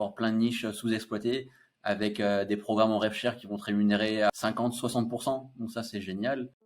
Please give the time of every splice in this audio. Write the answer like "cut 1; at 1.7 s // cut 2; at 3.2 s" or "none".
cut 1; at 4.3 s // cut 2; at 5.9 s